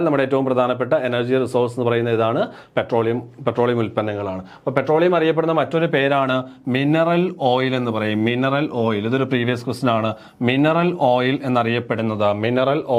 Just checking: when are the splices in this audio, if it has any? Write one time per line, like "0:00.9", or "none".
none